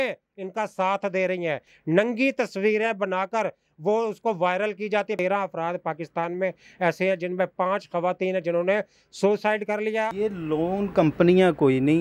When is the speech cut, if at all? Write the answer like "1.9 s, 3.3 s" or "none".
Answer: 1.7 s, 5.2 s, 10.1 s